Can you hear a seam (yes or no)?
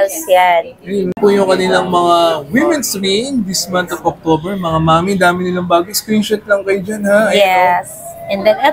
yes